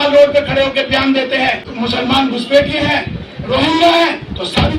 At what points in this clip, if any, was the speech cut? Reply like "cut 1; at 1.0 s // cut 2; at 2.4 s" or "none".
cut 1; at 1.7 s